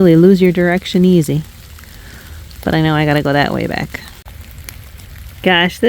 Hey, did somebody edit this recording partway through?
no; 0 cuts

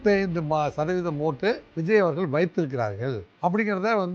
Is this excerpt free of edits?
no; 2 cuts; at 1.7 s, 3.3 s

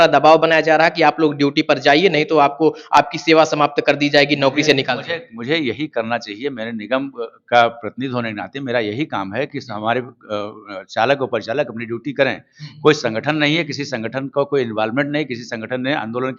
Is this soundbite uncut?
yes; 0 cuts

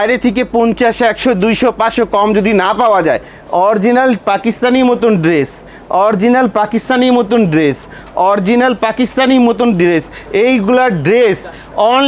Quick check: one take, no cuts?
no; 1 cut; at 3.3 s

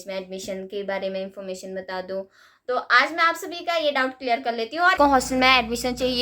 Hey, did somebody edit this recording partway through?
yes; 1 cut; at 5.0 s

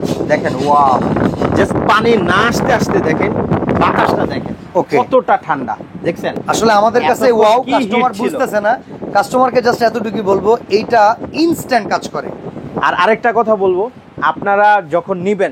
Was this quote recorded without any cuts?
yes; 0 cuts

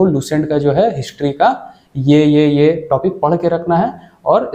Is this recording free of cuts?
yes; 0 cuts

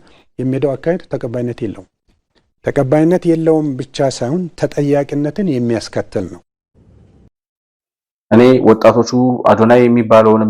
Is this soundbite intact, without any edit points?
yes; 0 cuts

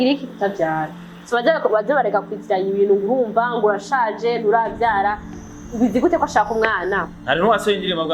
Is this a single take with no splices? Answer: yes; 0 cuts

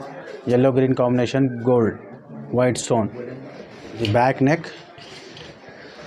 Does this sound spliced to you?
yes; 1 cut; at 4.0 s

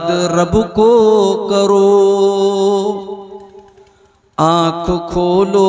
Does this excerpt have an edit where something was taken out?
no; 0 cuts

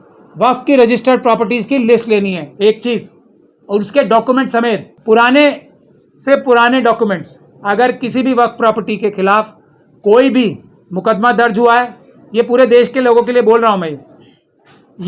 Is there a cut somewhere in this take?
yes; 1 cut; at 4.9 s

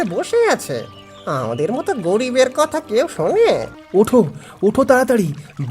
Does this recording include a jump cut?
yes; 1 cut; at 3.8 s

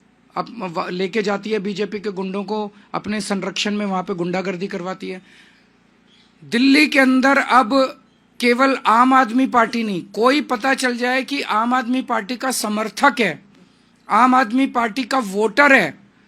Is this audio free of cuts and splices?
yes; 0 cuts

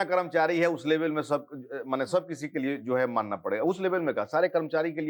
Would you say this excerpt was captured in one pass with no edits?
yes; 0 cuts

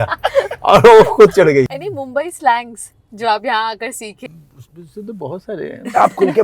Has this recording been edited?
yes; 2 cuts; at 1.8 s, 4.2 s

